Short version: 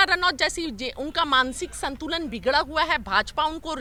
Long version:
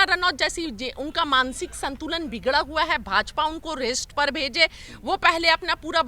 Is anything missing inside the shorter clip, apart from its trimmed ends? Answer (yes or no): no